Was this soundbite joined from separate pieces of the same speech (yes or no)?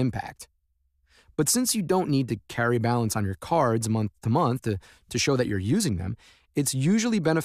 yes